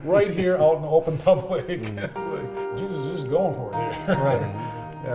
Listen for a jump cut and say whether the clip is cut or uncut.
cut